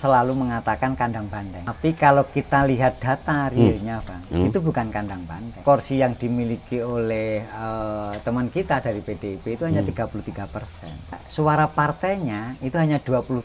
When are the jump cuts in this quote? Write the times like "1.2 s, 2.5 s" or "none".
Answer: 1.6 s, 5.6 s, 11.2 s